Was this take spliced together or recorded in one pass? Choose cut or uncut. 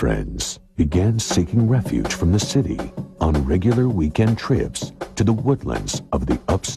cut